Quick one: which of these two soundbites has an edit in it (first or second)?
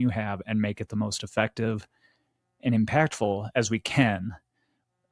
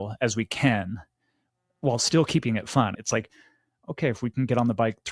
second